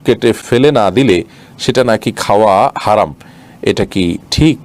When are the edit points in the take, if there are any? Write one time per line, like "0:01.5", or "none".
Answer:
none